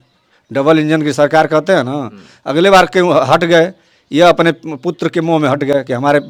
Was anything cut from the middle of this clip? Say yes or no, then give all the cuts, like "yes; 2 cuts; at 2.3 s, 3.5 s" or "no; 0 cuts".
no; 0 cuts